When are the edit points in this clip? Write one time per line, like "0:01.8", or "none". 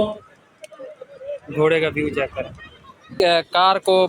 0:03.0